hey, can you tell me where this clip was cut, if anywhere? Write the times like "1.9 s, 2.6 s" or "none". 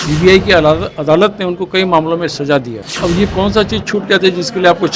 2.8 s